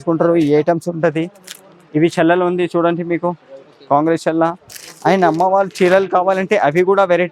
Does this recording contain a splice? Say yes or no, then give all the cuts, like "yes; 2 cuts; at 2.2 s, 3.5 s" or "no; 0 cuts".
no; 0 cuts